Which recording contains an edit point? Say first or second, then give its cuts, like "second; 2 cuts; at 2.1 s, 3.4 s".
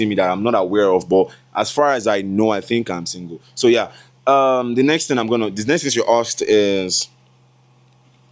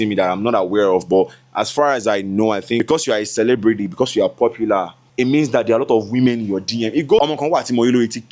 second; 3 cuts; at 2.8 s, 5.0 s, 7.2 s